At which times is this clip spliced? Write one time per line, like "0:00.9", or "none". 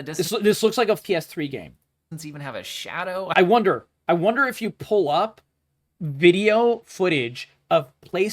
0:01.0

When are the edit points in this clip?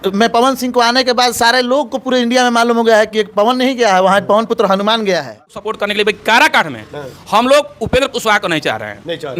0:05.7

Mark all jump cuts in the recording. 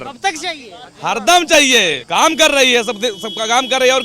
0:02.0

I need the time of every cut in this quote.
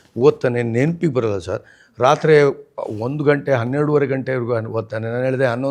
none

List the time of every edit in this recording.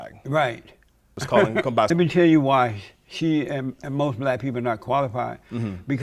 0:01.2
0:01.9

